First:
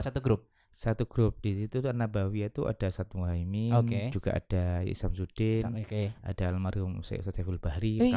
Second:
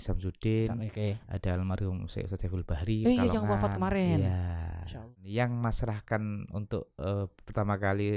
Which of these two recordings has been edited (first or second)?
second